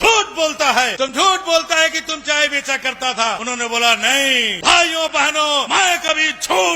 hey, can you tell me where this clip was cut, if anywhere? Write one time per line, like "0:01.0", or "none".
0:00.9
0:03.4
0:04.5
0:05.7